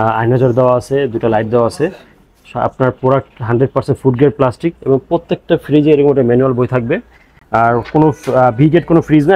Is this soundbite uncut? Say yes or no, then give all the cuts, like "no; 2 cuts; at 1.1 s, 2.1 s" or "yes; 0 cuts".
yes; 0 cuts